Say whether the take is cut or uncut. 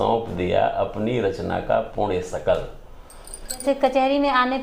cut